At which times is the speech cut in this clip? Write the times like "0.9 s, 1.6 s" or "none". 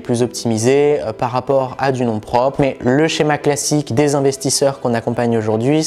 2.6 s, 3.9 s